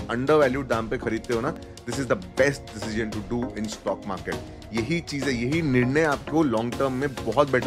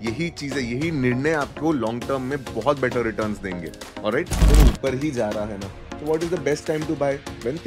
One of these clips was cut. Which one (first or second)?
second